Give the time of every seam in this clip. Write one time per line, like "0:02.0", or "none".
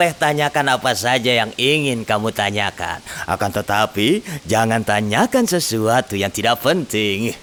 none